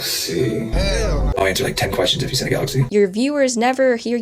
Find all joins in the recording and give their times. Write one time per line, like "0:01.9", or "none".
0:01.2
0:02.9